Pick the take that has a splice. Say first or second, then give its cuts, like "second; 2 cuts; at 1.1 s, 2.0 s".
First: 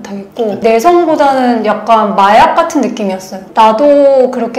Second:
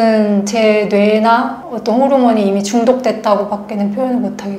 first; 1 cut; at 3.4 s